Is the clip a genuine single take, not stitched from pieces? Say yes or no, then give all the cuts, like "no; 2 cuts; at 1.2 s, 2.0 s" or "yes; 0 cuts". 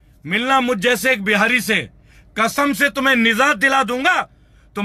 yes; 0 cuts